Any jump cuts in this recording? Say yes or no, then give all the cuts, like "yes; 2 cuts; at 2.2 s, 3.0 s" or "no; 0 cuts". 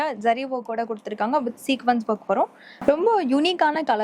yes; 1 cut; at 2.7 s